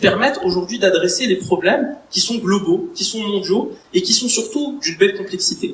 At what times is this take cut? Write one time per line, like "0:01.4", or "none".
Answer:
none